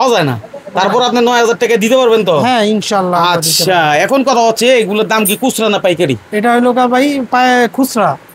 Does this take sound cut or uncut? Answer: uncut